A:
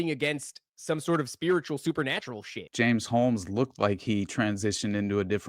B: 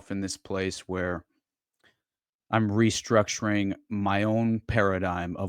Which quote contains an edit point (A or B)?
A